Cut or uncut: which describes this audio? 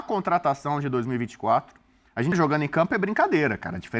cut